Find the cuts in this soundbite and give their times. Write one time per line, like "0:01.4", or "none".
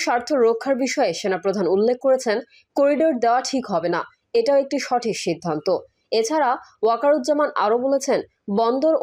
none